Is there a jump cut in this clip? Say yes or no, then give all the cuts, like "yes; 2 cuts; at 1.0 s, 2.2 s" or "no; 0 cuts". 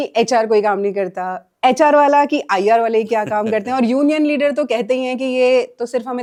no; 0 cuts